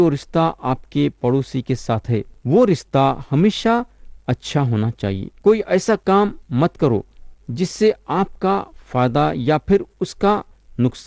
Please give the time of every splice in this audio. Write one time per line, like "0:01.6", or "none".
0:02.3
0:05.3